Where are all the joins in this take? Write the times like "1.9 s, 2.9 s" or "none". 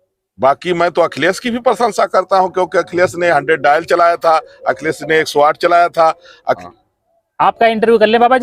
6.6 s